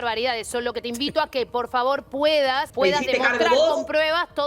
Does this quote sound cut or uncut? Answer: cut